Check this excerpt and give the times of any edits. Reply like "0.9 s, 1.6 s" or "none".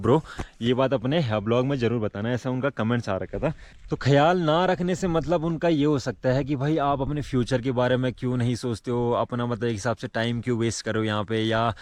none